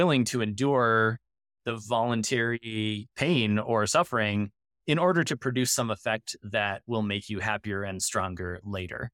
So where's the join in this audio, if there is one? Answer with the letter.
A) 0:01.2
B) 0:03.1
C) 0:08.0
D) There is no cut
B